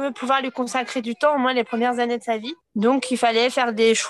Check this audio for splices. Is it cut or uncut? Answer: cut